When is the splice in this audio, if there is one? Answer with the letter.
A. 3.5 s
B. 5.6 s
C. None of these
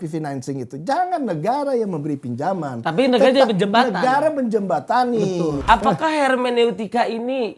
B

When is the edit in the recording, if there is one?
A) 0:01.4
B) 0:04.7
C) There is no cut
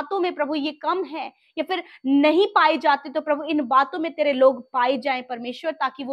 C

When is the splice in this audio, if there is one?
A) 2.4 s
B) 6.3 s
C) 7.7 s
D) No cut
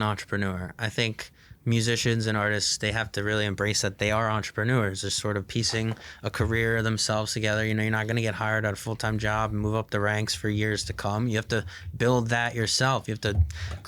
D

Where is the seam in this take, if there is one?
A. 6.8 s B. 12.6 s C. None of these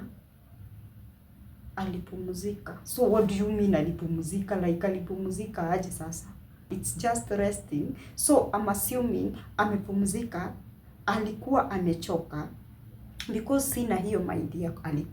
A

